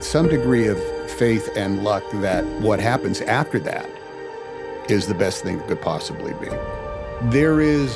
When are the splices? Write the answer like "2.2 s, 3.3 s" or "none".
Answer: 6.6 s